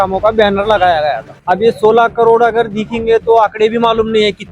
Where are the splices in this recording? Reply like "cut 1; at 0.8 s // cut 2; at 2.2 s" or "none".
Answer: cut 1; at 1.3 s